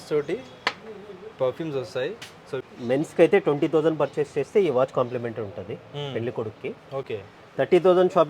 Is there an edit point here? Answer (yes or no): yes